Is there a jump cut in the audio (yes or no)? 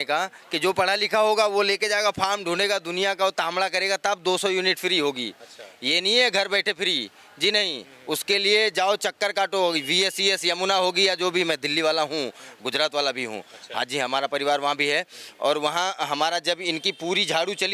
no